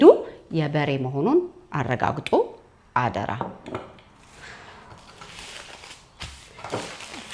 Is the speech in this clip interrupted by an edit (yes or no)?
no